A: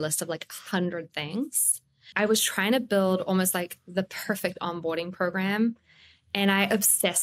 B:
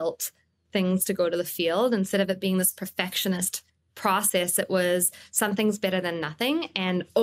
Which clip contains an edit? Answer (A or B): A